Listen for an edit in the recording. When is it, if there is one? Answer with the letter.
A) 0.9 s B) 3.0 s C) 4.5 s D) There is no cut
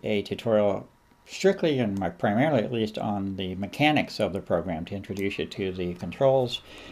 D